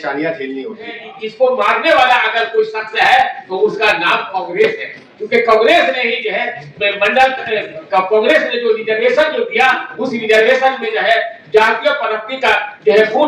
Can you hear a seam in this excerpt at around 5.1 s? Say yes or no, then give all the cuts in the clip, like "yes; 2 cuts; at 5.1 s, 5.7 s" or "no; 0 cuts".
no; 1 cut; at 1.4 s